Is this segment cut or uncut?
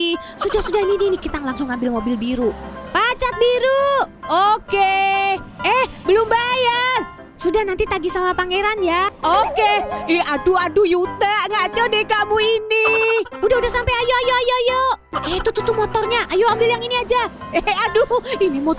cut